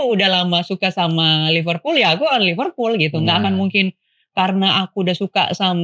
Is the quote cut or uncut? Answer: uncut